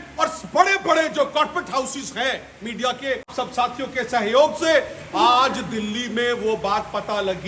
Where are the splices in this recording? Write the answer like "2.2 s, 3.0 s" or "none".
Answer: 3.3 s